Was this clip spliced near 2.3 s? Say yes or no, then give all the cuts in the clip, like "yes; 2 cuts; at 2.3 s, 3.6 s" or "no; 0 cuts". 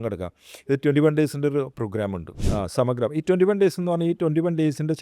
yes; 1 cut; at 2.3 s